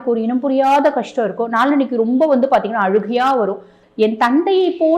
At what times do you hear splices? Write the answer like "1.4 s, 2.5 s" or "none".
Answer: 3.8 s